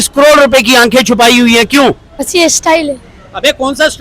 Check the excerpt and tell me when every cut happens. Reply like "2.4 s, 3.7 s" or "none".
2.3 s